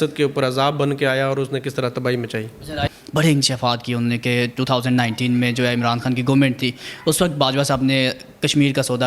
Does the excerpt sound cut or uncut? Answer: cut